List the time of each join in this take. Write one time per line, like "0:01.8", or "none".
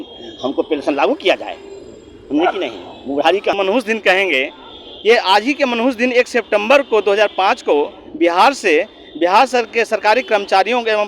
0:03.5